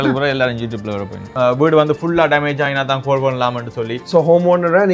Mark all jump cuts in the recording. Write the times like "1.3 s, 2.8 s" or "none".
1.3 s, 3.9 s